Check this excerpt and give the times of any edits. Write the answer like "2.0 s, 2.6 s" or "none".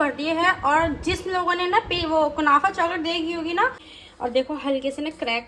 3.8 s